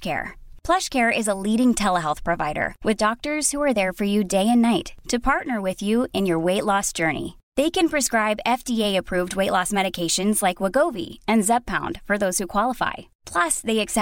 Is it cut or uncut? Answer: uncut